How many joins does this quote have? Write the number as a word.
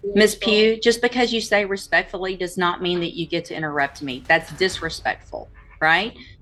zero